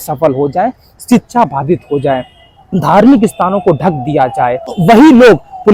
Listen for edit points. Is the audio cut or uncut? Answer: cut